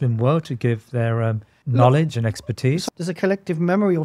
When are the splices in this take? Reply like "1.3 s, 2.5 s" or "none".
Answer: 1.5 s, 2.8 s